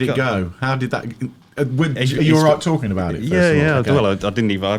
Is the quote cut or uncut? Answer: uncut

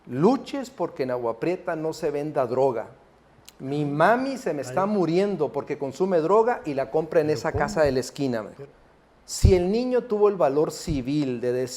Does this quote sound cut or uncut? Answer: cut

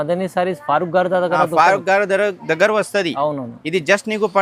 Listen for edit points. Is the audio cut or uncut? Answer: uncut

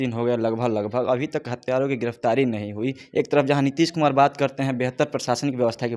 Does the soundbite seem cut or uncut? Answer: uncut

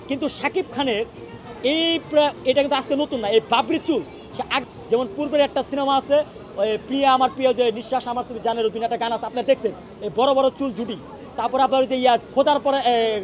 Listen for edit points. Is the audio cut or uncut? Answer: cut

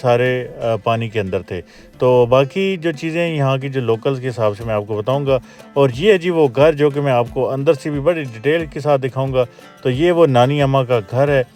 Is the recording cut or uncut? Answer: uncut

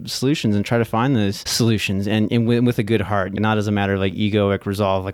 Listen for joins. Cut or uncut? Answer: cut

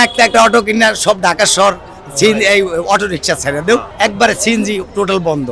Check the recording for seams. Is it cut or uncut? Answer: uncut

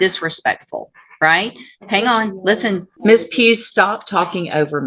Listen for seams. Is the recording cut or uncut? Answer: cut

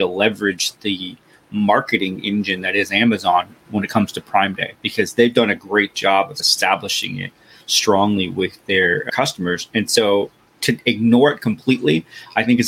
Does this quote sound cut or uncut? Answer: cut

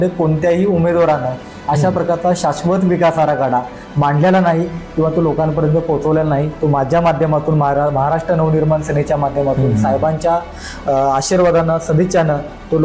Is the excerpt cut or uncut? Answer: uncut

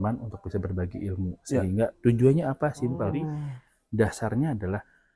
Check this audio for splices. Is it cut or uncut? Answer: cut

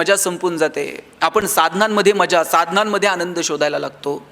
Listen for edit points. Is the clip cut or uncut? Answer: uncut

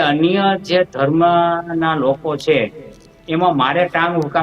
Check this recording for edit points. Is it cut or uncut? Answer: uncut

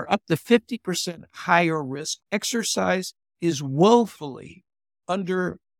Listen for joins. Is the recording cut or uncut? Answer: cut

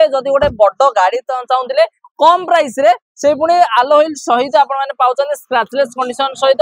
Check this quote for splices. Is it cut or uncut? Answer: uncut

